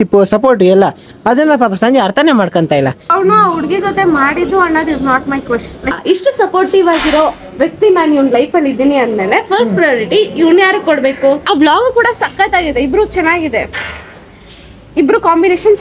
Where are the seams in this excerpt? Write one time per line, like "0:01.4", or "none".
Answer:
0:03.0
0:06.0
0:11.4